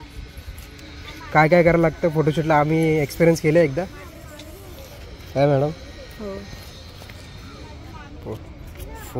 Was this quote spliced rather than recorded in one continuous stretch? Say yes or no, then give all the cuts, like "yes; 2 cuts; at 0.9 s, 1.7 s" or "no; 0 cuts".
no; 0 cuts